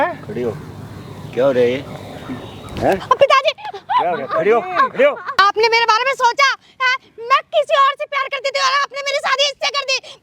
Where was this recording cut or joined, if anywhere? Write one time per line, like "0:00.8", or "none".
0:05.3

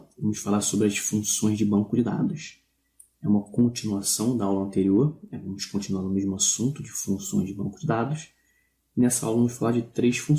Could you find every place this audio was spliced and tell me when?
0:09.1

